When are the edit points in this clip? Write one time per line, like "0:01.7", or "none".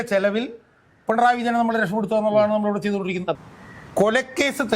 0:03.4